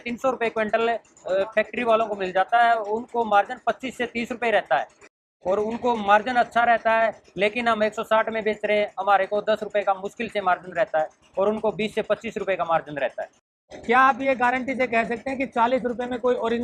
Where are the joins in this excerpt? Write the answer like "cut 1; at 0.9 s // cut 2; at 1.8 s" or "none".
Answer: cut 1; at 5.2 s // cut 2; at 13.5 s